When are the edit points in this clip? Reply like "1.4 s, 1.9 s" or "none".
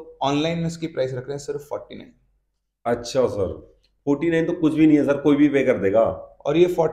none